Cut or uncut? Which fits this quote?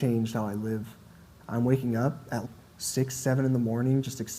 cut